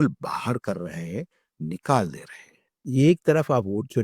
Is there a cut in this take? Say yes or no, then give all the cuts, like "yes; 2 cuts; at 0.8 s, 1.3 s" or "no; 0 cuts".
yes; 1 cut; at 2.7 s